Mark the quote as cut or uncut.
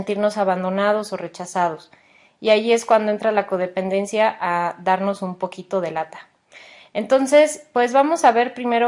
cut